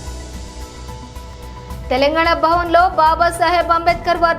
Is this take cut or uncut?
cut